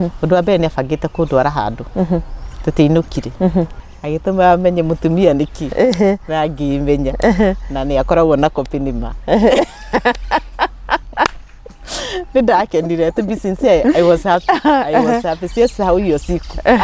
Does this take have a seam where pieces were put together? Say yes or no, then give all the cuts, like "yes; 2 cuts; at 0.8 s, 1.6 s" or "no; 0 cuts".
yes; 1 cut; at 3.8 s